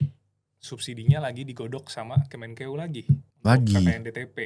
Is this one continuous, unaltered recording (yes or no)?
no